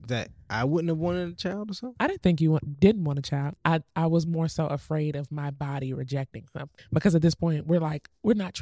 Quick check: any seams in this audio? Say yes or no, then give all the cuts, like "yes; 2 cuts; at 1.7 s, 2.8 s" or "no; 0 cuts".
yes; 2 cuts; at 3.5 s, 6.8 s